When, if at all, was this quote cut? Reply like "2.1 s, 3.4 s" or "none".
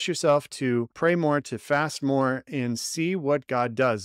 0.9 s